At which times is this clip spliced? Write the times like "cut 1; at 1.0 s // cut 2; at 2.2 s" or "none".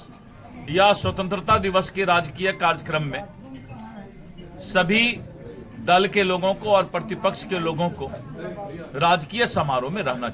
none